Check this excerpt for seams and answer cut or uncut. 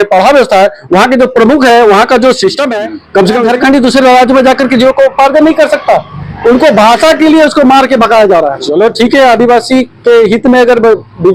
cut